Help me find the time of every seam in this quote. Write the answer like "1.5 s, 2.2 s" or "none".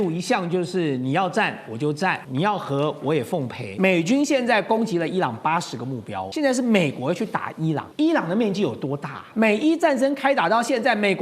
2.2 s, 3.6 s, 6.2 s, 7.9 s, 9.2 s

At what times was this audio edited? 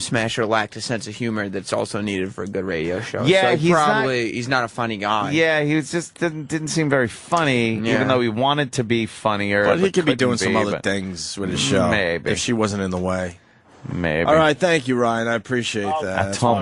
6.0 s

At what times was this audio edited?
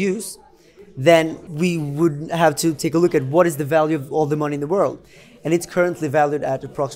1.4 s

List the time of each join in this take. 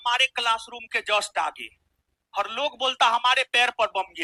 none

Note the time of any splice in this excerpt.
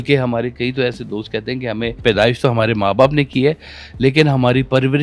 2.0 s

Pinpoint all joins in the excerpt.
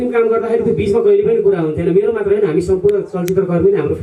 none

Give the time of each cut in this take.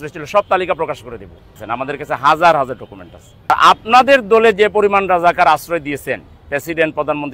1.6 s, 3.5 s

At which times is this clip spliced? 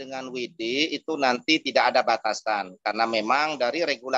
none

